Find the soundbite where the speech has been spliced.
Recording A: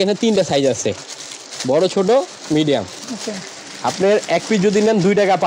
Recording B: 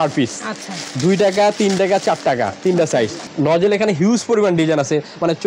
B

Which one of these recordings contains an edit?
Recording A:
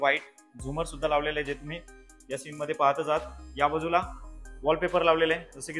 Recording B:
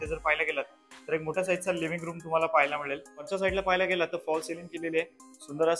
B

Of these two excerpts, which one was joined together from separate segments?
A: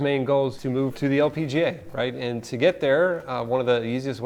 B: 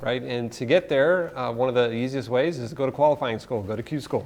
A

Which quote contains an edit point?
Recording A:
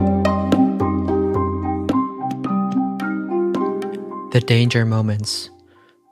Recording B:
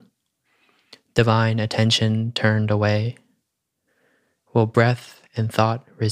A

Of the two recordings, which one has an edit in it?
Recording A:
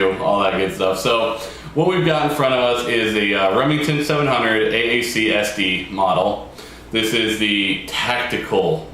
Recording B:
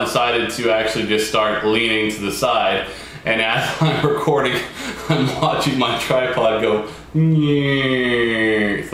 A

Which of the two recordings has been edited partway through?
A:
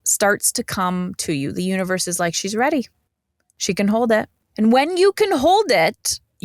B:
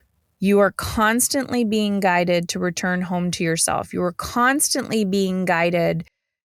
A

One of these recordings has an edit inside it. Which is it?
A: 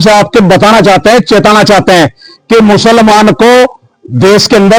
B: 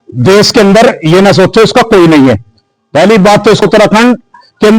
B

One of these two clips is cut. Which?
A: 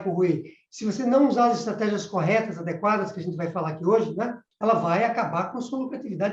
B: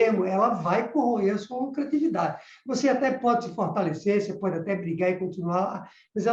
A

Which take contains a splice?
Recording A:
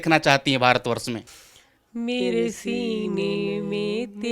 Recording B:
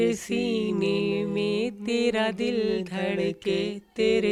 A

